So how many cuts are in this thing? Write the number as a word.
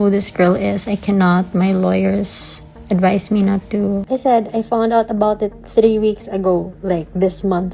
one